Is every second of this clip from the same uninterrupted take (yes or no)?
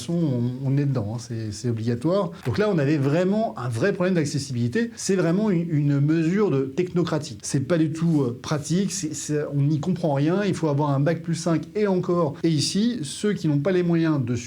no